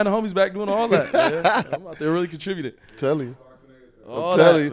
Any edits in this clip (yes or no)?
no